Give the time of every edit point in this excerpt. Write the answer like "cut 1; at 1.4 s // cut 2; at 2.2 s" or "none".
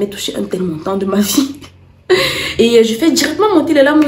cut 1; at 2.4 s